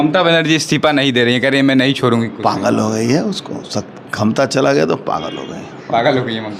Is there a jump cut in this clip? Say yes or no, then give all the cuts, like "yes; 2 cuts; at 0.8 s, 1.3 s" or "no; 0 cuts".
no; 0 cuts